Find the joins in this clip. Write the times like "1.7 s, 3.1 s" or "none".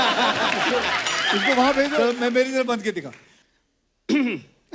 2.0 s